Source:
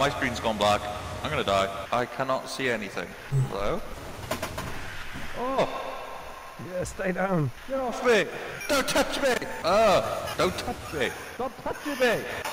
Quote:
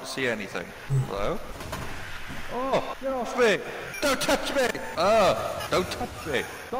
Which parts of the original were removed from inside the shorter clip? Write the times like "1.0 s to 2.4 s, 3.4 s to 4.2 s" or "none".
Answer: 4.0 s to 4.5 s, 5.8 s to 7.6 s